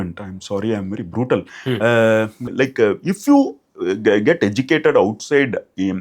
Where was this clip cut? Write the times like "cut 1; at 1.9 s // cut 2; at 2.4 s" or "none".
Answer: cut 1; at 2.5 s